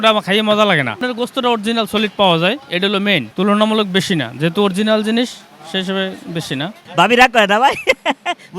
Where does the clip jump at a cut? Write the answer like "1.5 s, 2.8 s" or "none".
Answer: 1.0 s, 3.3 s, 6.8 s